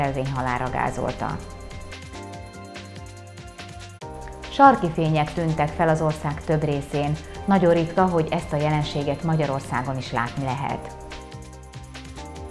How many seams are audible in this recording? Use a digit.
1